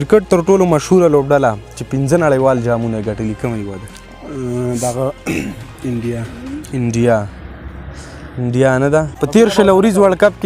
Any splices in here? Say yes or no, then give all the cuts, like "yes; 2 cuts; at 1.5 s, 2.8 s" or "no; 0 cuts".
yes; 1 cut; at 9.2 s